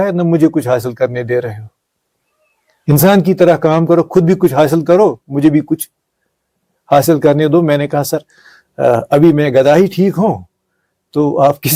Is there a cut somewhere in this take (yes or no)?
no